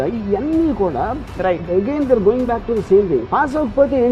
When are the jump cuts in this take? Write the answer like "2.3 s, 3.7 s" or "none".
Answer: none